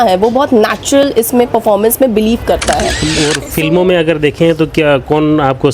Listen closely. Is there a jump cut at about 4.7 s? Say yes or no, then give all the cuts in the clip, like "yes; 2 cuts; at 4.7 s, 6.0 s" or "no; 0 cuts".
no; 1 cut; at 3.0 s